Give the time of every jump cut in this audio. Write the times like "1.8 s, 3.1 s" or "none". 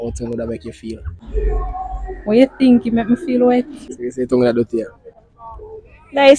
1.1 s, 4.0 s